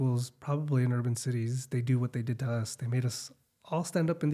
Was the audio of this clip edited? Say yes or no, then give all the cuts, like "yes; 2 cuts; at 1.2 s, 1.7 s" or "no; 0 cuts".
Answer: no; 0 cuts